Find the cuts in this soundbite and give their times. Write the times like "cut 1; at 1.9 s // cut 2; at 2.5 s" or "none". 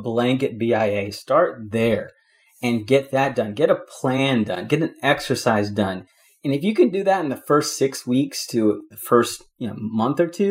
none